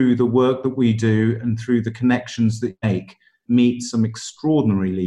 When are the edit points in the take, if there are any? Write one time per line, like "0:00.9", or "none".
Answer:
none